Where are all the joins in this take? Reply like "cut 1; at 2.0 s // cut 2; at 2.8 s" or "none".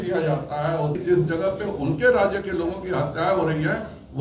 cut 1; at 1.0 s